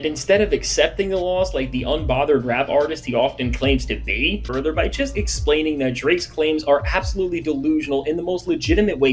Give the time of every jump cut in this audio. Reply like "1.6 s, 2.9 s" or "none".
4.5 s

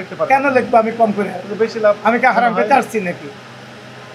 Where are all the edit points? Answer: none

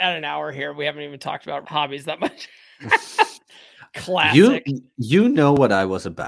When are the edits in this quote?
1.6 s

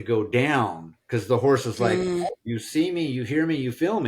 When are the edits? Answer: 2.3 s

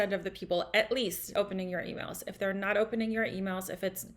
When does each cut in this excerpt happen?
1.3 s

